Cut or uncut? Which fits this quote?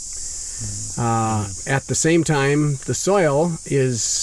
uncut